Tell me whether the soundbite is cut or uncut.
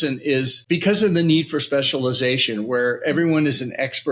uncut